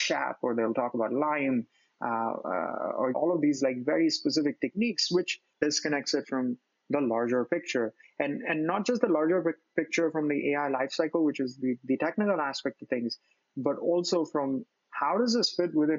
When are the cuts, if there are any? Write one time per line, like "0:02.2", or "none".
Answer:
0:03.2
0:05.6